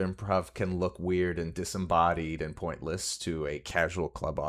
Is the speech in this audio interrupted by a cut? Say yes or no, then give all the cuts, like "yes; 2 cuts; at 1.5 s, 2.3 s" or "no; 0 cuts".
no; 0 cuts